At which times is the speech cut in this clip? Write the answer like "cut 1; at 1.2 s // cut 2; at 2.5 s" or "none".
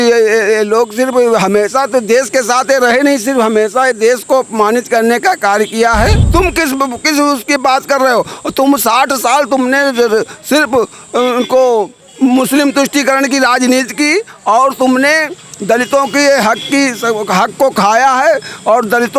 cut 1; at 6.2 s